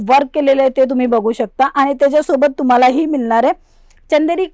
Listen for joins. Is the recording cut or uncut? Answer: uncut